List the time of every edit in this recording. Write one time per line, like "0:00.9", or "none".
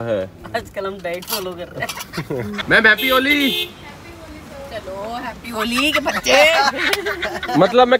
0:02.5